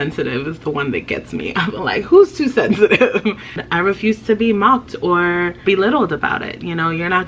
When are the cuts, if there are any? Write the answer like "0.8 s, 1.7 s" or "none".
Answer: 3.6 s, 5.6 s